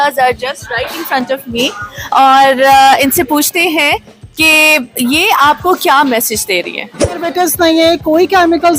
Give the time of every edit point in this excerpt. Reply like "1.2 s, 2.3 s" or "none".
7.3 s